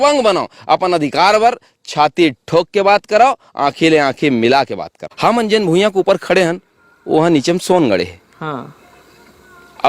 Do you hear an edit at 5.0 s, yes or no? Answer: yes